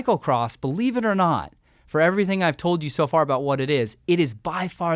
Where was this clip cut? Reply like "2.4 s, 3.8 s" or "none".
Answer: none